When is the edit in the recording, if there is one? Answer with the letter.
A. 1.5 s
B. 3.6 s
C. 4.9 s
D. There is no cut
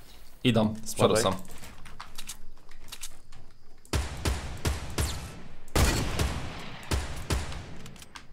D